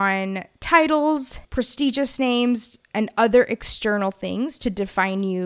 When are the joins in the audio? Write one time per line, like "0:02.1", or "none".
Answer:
none